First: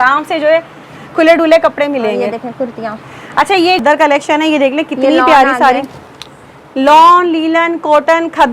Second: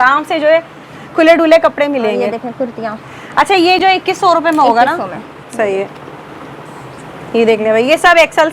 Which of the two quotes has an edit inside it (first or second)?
first